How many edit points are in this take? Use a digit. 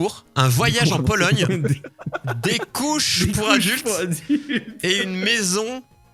0